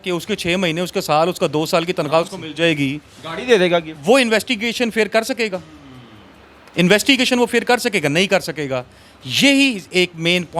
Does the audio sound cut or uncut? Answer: uncut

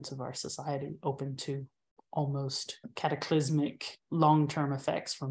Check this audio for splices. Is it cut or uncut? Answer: cut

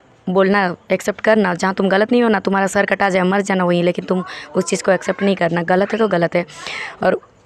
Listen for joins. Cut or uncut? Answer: uncut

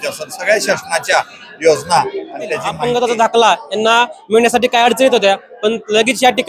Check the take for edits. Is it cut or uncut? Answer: cut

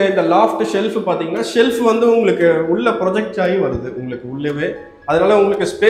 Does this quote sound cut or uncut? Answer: uncut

